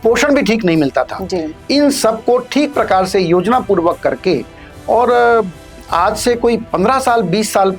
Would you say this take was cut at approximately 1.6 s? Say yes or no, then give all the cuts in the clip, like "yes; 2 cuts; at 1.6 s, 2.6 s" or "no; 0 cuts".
no; 0 cuts